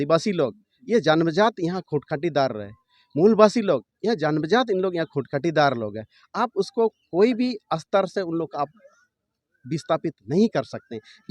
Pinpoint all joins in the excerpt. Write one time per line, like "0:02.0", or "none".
none